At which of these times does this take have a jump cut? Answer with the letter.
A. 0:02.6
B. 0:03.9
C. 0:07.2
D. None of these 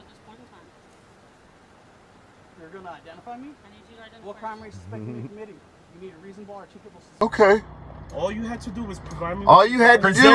C